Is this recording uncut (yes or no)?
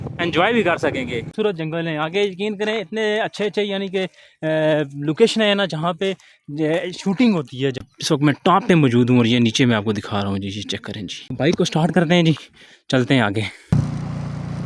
no